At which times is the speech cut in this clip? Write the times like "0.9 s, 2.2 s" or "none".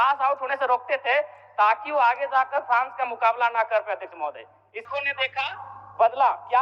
4.9 s